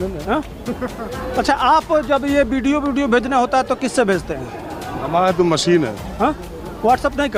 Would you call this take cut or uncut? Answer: uncut